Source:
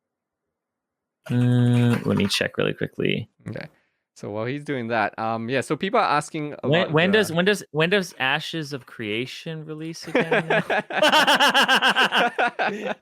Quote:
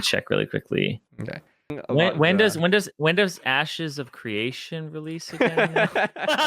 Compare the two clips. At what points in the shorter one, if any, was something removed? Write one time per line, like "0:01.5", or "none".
0:01.7